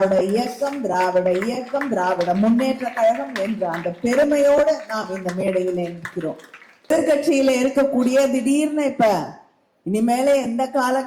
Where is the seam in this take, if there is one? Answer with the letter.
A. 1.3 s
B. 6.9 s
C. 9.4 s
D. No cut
B